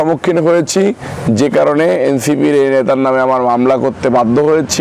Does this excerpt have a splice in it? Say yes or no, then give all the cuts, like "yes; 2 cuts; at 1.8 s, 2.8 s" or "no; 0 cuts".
no; 0 cuts